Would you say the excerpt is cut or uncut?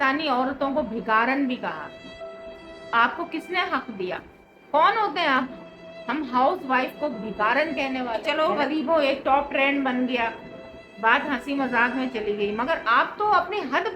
cut